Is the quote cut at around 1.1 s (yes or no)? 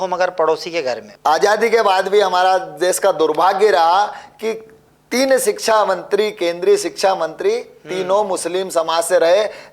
yes